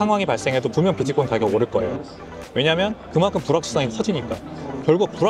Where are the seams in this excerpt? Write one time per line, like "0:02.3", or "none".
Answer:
none